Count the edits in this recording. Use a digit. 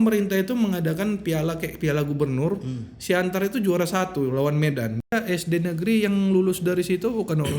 1